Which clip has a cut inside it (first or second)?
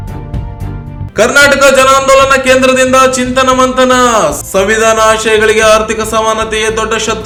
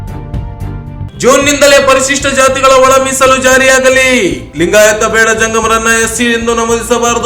second